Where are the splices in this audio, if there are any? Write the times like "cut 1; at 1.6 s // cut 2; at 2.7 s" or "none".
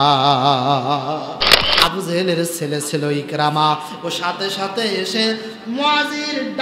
cut 1; at 1.6 s